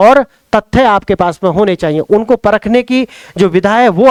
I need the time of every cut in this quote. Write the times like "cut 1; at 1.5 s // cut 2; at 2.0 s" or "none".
none